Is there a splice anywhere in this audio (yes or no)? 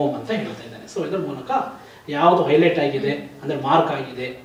no